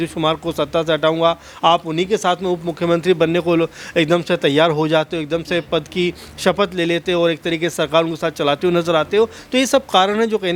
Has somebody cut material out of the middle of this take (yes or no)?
no